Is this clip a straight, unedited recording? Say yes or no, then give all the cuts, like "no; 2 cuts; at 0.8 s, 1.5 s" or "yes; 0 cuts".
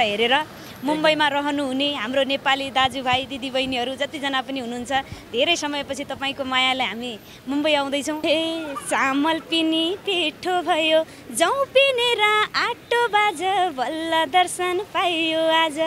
no; 1 cut; at 8.2 s